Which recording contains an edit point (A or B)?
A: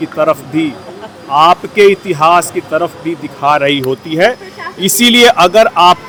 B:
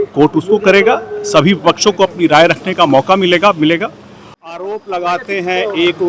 B